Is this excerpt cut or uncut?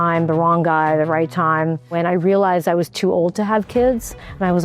cut